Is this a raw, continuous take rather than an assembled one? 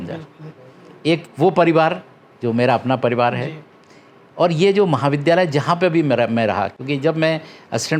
yes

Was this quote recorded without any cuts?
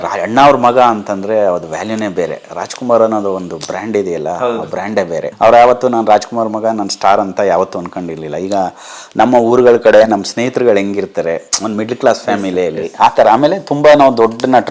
no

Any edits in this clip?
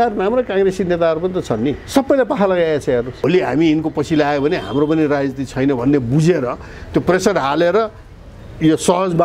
yes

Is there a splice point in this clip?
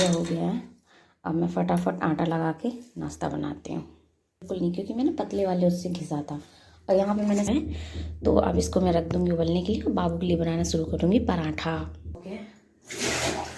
yes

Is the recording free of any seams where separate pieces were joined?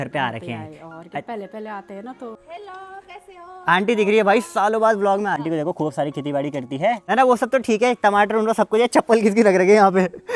no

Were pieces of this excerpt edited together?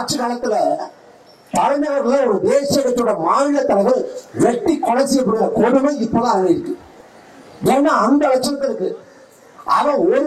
no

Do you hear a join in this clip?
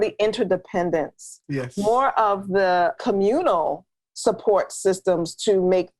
yes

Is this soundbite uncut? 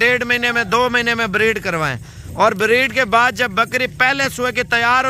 yes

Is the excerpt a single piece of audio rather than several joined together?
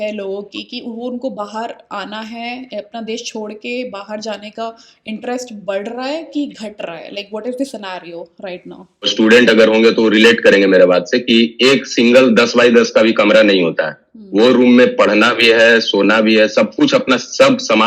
no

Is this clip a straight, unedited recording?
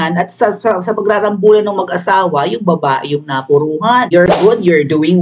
no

